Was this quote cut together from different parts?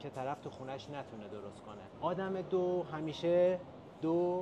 yes; 1 cut; at 1.8 s

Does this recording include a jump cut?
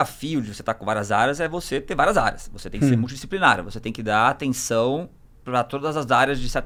no; 0 cuts

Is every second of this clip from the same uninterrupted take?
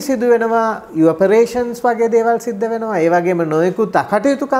yes; 0 cuts

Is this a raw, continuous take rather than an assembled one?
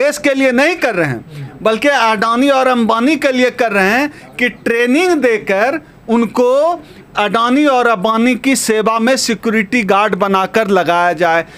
yes; 0 cuts

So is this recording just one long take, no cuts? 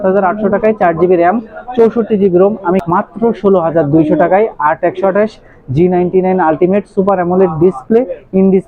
no; 1 cut; at 2.8 s

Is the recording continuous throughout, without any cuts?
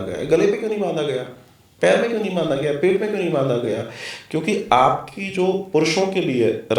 yes; 0 cuts

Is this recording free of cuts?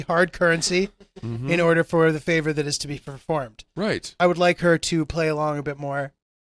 no; 1 cut; at 4.2 s

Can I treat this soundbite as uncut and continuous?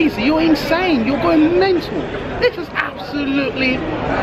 yes; 0 cuts

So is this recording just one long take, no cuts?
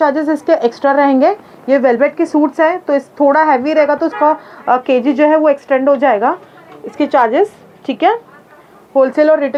yes; 0 cuts

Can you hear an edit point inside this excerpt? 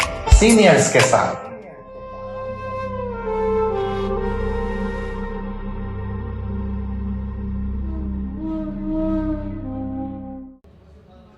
yes; 1 cut; at 10.5 s

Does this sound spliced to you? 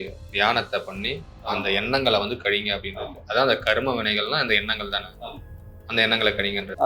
no; 0 cuts

